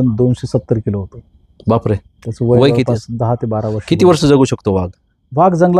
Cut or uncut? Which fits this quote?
uncut